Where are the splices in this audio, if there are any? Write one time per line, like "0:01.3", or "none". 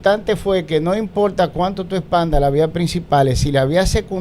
none

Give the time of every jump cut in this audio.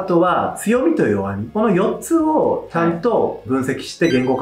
0:03.4

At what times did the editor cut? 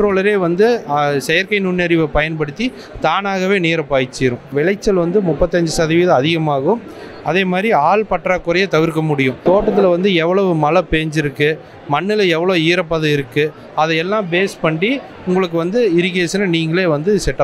0:04.5
0:09.4

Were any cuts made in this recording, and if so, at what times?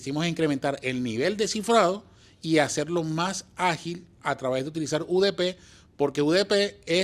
none

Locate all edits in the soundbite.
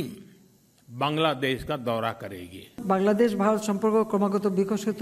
0:02.7

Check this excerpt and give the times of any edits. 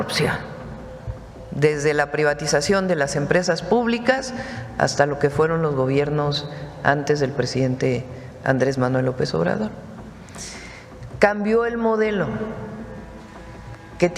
none

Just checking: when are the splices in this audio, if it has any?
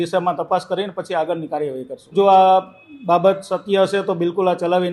0:02.1

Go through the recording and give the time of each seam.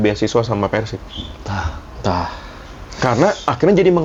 none

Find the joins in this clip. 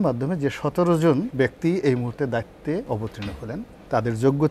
0:01.3
0:03.2

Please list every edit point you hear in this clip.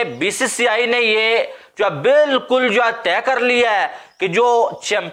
none

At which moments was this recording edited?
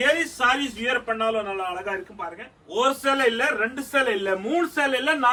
none

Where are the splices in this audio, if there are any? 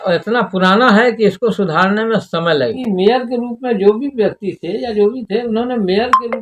0:02.8

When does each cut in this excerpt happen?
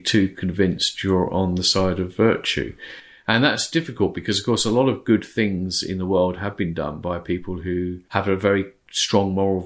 0:08.0

